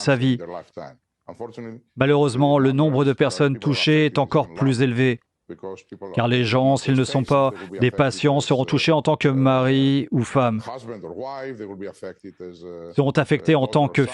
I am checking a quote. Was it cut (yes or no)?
yes